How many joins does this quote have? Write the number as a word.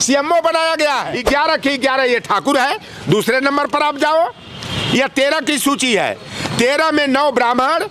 one